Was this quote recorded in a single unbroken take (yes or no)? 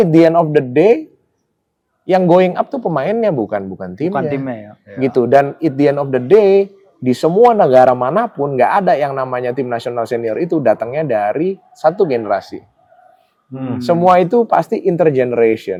yes